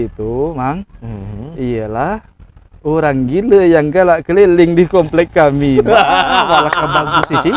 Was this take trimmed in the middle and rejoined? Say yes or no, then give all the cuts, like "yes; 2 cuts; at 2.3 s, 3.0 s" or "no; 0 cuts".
no; 0 cuts